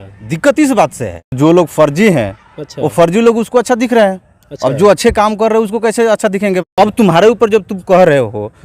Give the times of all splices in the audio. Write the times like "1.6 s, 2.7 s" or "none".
1.4 s, 6.7 s